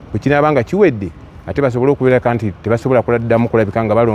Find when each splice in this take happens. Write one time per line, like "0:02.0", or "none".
none